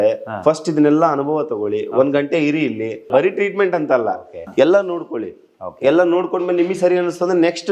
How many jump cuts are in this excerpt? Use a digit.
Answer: 2